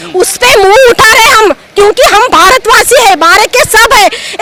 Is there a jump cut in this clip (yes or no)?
no